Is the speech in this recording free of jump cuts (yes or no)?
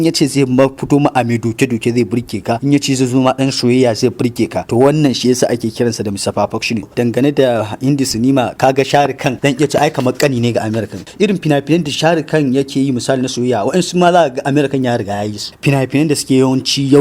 no